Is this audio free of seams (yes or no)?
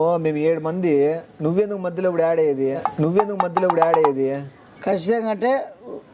yes